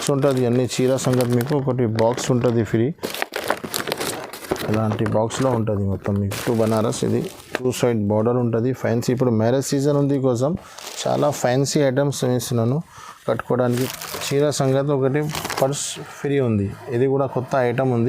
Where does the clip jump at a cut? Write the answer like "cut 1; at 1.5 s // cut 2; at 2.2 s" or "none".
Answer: cut 1; at 6.3 s // cut 2; at 13.9 s